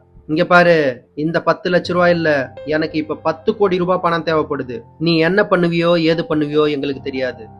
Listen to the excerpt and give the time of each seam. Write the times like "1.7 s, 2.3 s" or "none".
none